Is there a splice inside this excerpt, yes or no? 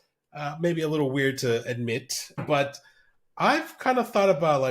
yes